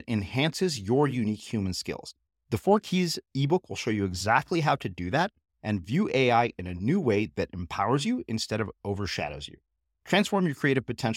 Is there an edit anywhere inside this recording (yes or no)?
no